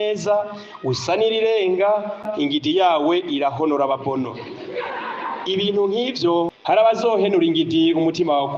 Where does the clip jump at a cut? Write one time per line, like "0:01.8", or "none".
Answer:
0:02.3
0:06.8